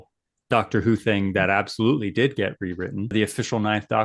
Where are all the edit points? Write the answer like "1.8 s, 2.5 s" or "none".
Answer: 3.1 s